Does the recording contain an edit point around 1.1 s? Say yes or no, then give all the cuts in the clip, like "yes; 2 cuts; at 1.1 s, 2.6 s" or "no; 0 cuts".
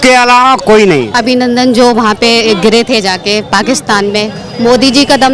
yes; 1 cut; at 1.1 s